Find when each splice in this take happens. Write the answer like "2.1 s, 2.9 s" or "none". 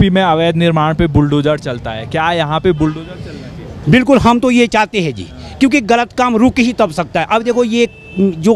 none